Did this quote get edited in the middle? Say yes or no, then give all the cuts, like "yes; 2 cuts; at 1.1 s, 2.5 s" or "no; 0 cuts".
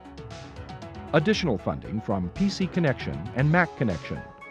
yes; 1 cut; at 1.0 s